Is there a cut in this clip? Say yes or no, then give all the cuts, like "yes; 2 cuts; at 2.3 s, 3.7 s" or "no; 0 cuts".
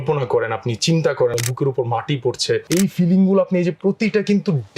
yes; 2 cuts; at 1.3 s, 2.6 s